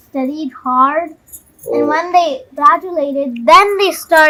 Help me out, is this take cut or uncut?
uncut